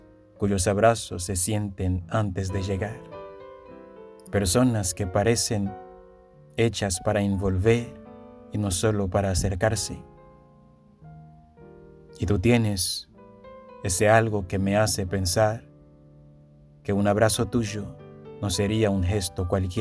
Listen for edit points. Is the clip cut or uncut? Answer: uncut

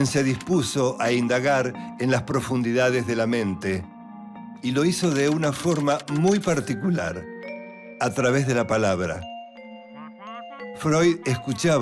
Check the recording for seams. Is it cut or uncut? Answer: uncut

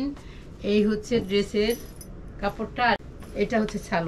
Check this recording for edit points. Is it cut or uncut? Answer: cut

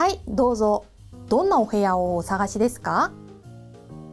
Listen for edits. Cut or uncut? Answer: cut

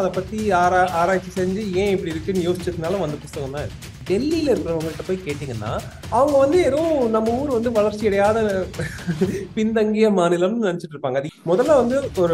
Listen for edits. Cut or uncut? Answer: cut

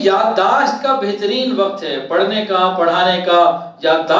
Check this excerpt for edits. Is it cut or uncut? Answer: uncut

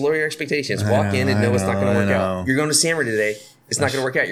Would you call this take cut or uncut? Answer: uncut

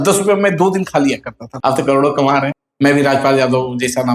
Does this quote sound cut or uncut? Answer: cut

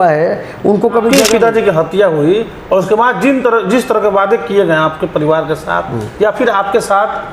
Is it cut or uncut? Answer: cut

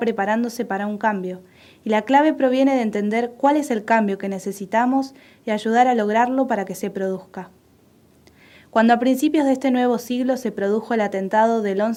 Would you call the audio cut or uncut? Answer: uncut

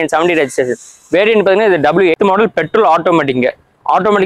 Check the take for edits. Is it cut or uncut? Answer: cut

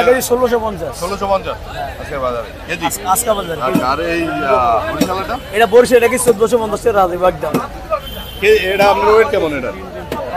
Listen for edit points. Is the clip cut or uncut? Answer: uncut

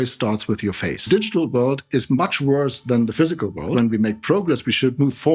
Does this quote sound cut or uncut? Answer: cut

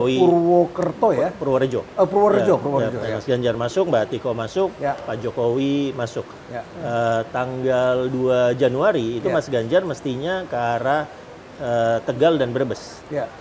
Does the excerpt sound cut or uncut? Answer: uncut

